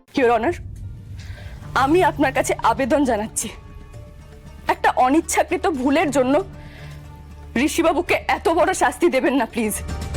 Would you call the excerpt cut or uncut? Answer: uncut